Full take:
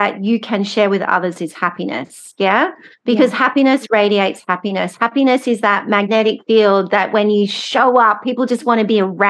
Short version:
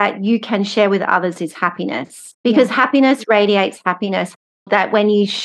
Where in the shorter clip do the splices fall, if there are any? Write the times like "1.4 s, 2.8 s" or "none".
2.2 s, 4.6 s